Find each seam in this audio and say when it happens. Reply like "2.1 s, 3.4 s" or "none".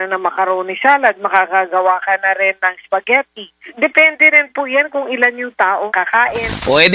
none